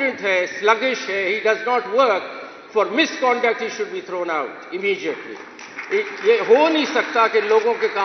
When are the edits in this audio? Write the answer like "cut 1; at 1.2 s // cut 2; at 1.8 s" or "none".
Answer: none